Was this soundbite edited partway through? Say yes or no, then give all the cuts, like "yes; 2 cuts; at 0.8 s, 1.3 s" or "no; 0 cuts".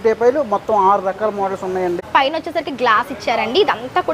yes; 1 cut; at 2.0 s